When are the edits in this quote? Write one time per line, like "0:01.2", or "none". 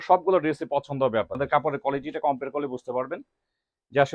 0:01.4